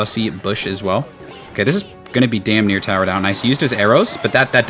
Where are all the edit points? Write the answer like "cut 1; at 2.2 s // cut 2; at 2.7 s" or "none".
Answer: cut 1; at 1.5 s